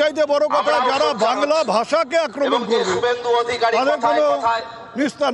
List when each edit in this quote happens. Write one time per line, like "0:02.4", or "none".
none